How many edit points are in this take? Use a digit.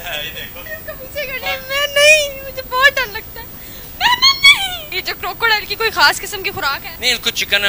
0